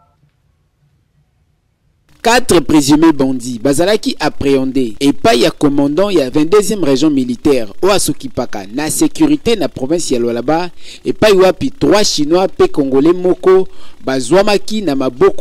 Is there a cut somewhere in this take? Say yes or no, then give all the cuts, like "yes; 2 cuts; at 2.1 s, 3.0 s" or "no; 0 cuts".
yes; 1 cut; at 2.1 s